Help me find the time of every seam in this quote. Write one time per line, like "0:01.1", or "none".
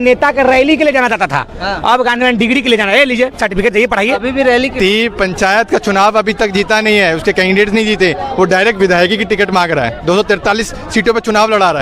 0:04.7